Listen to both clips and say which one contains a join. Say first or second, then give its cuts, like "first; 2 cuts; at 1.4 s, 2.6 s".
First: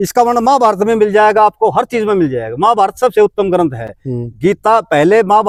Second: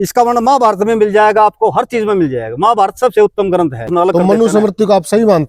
second; 1 cut; at 3.9 s